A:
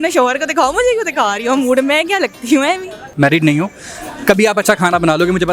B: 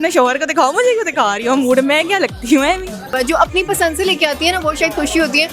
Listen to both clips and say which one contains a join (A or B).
B